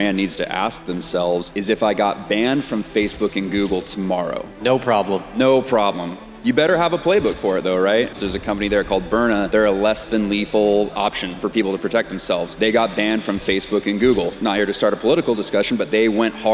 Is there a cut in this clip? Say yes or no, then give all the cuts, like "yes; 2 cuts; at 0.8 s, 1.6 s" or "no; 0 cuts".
yes; 7 cuts; at 1.5 s, 4.5 s, 8.1 s, 9.5 s, 10.9 s, 12.5 s, 14.3 s